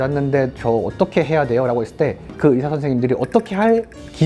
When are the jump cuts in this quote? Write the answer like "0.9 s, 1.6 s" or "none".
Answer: none